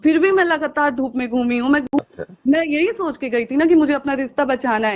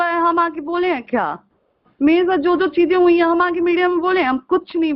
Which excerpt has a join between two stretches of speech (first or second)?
first